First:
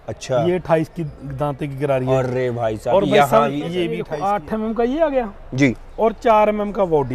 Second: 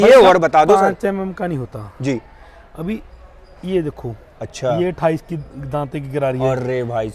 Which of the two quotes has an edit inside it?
first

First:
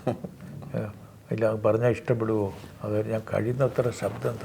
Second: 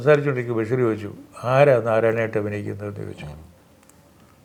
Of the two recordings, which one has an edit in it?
first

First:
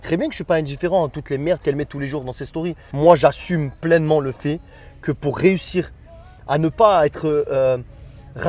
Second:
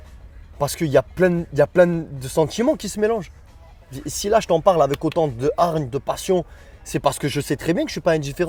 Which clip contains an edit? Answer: first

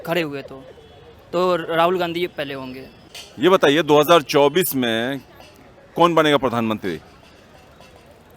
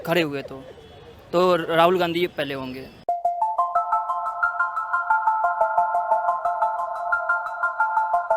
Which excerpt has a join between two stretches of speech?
first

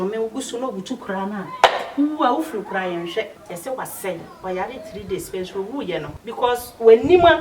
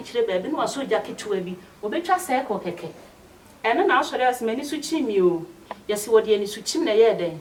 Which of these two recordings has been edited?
first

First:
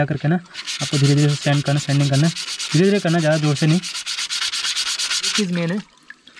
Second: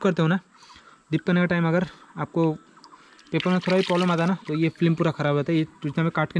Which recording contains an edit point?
first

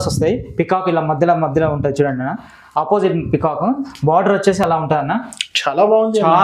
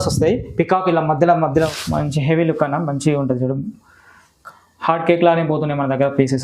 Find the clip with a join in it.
second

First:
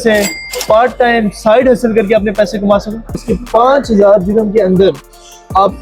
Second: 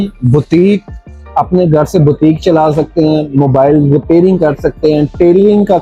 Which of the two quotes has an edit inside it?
first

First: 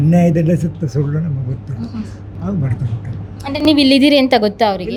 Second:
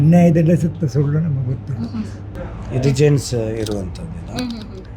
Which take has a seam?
second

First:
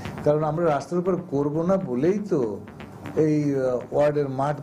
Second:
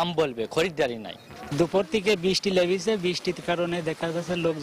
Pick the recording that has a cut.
second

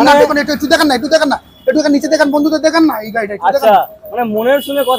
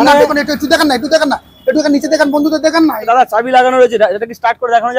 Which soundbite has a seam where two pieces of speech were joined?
second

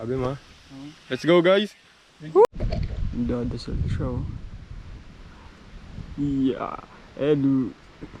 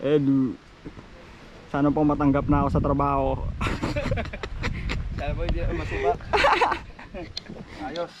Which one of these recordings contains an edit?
first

